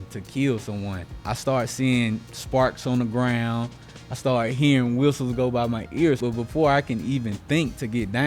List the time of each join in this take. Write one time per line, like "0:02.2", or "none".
0:01.1
0:06.2